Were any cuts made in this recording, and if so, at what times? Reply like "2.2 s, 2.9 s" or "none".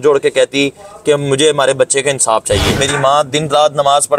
2.8 s